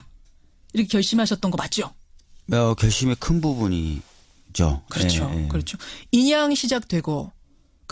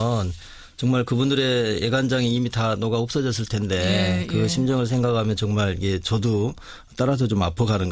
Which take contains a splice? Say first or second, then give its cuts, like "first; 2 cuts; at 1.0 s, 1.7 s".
second; 1 cut; at 3.0 s